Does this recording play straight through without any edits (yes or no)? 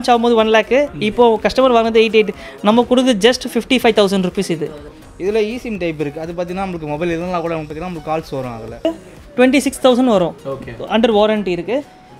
no